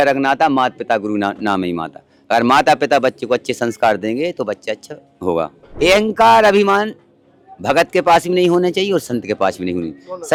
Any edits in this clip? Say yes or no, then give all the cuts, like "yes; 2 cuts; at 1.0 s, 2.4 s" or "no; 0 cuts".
no; 0 cuts